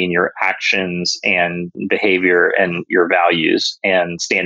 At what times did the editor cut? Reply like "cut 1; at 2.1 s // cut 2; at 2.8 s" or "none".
cut 1; at 1.7 s